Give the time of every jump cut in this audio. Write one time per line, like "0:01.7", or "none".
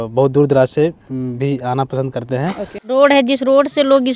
0:02.8